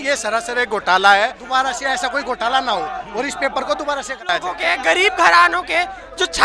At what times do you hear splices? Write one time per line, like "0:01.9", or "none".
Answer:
0:01.4
0:04.6